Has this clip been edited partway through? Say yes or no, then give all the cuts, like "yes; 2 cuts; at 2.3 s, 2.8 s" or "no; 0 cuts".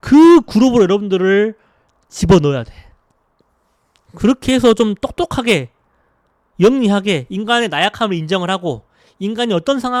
no; 0 cuts